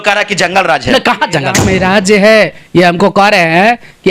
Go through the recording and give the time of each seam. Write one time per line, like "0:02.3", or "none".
0:01.6

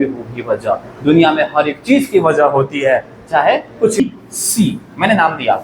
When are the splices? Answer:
0:04.0

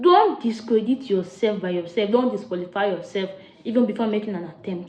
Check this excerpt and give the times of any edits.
none

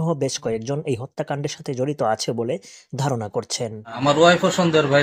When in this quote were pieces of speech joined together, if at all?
0:04.0

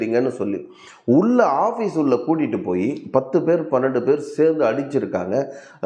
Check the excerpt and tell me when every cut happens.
none

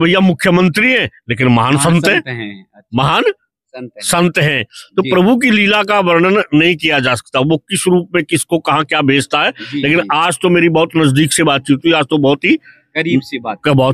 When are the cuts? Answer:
none

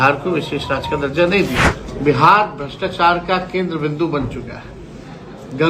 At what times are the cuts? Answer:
0:01.9

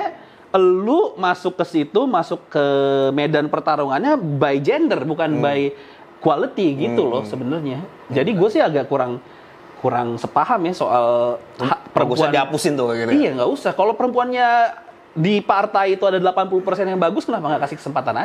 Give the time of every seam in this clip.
none

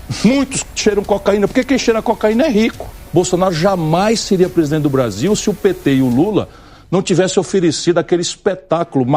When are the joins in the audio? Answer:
0:03.0

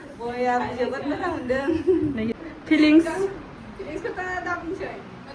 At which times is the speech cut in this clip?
0:02.5

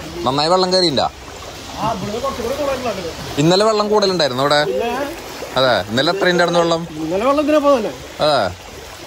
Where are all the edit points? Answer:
none

